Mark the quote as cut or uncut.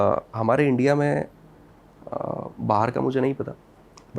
uncut